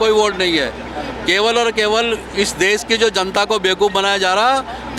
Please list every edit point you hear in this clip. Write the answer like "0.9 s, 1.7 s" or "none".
none

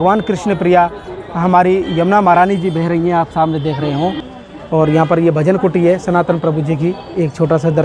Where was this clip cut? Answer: 4.3 s

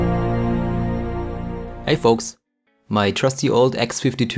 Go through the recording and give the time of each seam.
1.7 s

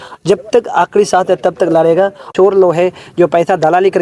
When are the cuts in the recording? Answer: 2.3 s

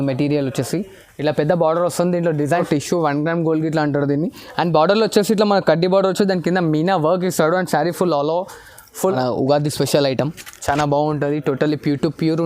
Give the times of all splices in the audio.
2.6 s, 9.1 s

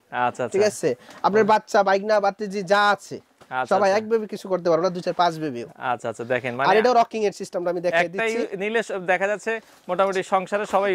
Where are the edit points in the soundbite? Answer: none

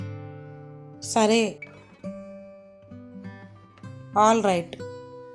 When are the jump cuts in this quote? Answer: none

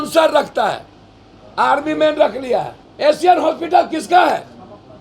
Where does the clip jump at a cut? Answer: 2.8 s

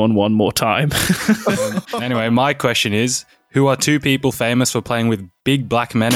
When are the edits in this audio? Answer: 1.9 s

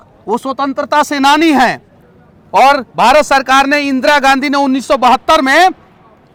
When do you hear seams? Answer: none

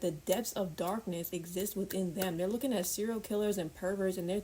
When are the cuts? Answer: none

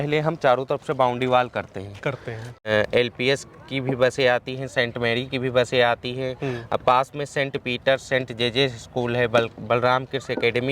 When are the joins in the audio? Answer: 2.7 s

